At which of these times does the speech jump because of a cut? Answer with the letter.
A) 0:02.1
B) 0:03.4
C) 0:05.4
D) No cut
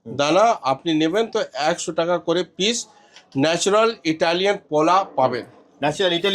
D